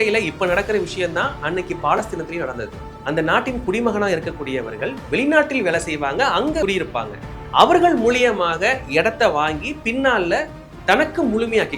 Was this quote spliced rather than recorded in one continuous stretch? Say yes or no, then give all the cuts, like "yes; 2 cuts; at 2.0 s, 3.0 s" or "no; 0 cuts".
no; 0 cuts